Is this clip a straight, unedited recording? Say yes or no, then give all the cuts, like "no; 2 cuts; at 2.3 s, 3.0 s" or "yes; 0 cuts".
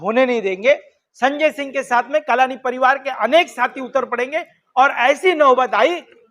yes; 0 cuts